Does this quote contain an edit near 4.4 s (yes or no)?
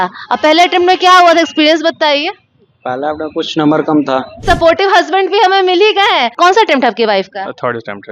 yes